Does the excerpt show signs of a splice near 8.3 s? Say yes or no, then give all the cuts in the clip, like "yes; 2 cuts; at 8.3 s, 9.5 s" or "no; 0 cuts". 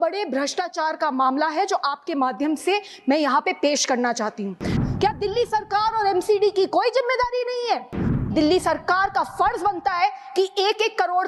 yes; 2 cuts; at 4.8 s, 8.3 s